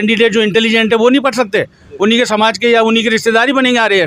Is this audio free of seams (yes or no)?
yes